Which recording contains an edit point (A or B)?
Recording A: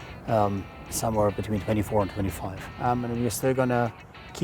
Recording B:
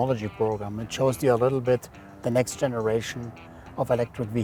A